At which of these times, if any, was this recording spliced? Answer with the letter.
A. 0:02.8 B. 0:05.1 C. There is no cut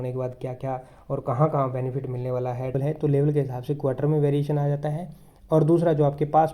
A